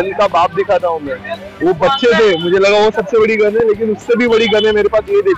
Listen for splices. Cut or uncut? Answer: uncut